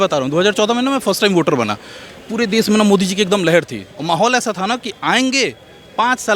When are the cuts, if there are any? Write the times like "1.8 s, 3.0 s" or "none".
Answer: none